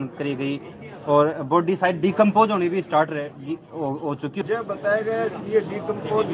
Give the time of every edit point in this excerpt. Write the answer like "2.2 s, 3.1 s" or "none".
4.4 s